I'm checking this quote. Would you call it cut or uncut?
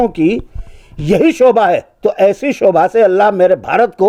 uncut